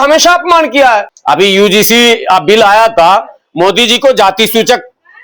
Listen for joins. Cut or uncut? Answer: cut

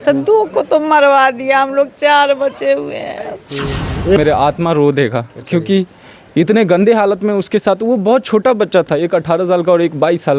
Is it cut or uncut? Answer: cut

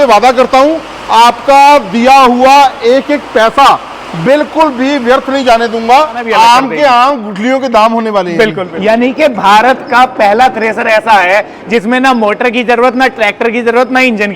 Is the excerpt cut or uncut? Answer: cut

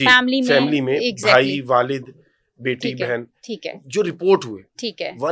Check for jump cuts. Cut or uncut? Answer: uncut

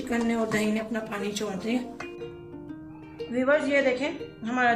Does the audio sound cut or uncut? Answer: cut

